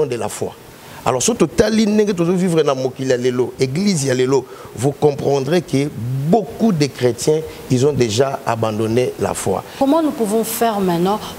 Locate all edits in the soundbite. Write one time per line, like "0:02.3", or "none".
0:09.7